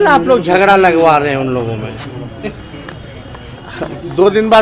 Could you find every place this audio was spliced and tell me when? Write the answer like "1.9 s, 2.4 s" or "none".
none